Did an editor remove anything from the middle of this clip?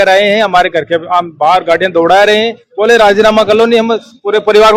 no; 0 cuts

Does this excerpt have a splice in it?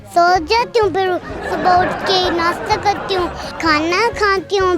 yes; 1 cut; at 3.4 s

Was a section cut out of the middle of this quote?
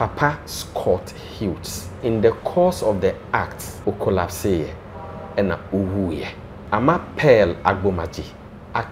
yes; 2 cuts; at 2.0 s, 3.6 s

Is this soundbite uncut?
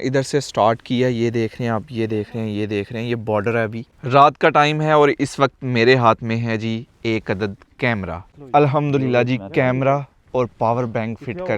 no; 2 cuts; at 3.9 s, 8.3 s

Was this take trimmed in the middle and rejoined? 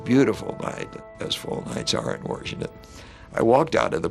yes; 1 cut; at 1.0 s

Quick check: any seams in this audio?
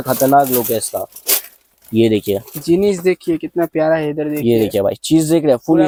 no; 0 cuts

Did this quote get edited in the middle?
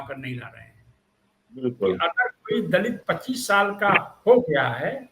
yes; 1 cut; at 1.6 s

